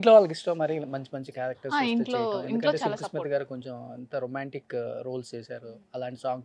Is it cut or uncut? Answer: uncut